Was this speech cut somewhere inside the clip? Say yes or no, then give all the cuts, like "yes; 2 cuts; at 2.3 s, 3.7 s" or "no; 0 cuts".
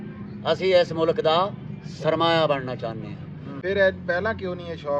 yes; 1 cut; at 3.5 s